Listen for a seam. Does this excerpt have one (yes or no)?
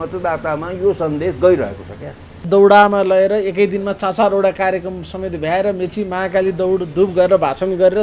yes